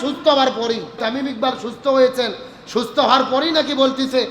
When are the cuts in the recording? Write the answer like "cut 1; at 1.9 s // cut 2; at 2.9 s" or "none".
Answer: cut 1; at 1.0 s